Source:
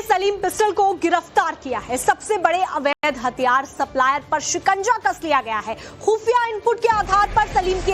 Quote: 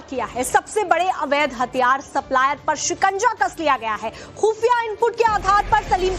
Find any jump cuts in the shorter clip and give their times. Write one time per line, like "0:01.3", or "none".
0:01.4